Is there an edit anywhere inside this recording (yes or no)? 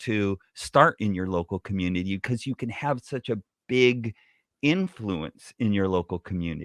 no